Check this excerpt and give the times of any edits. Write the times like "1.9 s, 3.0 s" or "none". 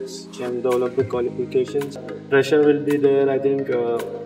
1.9 s